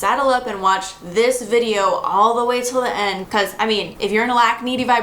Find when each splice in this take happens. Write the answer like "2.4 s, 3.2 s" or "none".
3.6 s

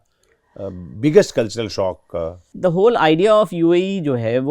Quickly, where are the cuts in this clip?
2.5 s

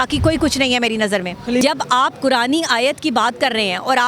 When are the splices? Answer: 1.6 s

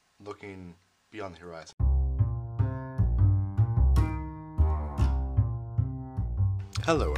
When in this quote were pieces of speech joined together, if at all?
1.7 s

